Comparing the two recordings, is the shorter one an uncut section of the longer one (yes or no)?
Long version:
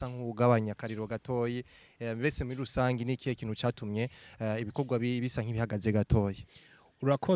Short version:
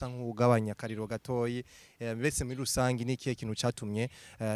yes